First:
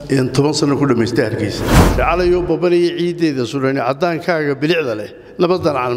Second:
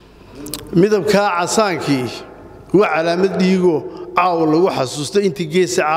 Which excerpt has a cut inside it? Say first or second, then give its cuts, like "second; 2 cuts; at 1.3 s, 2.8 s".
first; 1 cut; at 2.0 s